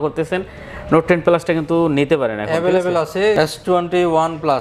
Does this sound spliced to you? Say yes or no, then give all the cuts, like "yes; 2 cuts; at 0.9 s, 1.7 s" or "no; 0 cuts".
yes; 1 cut; at 3.4 s